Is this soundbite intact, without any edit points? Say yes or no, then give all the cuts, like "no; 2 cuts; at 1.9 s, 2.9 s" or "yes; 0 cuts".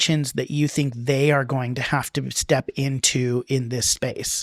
yes; 0 cuts